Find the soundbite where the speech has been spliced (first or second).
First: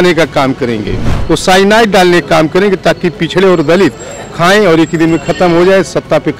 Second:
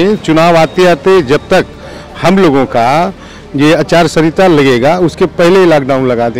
first